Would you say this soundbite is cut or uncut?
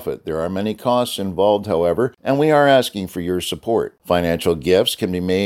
cut